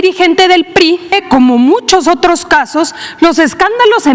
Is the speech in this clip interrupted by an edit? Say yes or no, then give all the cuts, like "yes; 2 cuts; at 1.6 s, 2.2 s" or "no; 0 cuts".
yes; 1 cut; at 1.2 s